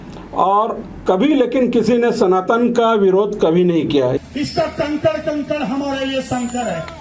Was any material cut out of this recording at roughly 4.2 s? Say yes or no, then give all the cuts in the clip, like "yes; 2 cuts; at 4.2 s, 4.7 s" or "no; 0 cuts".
yes; 1 cut; at 4.2 s